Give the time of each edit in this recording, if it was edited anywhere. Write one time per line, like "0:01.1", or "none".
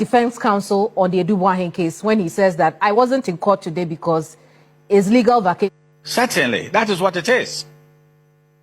0:05.7